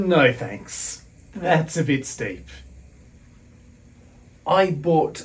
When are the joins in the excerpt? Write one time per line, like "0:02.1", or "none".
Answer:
0:03.0